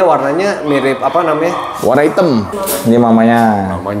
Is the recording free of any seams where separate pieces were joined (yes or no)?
no